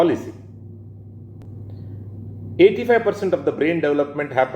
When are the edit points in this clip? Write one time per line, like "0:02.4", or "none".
0:01.4